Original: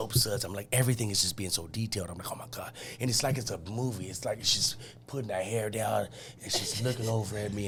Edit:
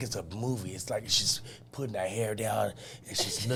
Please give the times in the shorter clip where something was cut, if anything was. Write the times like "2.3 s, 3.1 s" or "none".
none